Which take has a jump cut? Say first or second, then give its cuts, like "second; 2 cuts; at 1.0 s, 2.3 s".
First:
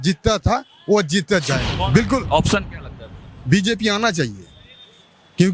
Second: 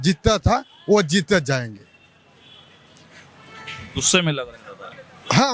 first; 1 cut; at 1.7 s